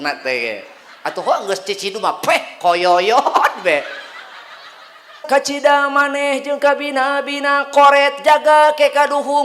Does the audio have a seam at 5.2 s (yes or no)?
yes